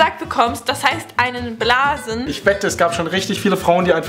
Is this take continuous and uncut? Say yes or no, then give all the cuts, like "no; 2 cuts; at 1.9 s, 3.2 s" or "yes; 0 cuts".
no; 1 cut; at 2.3 s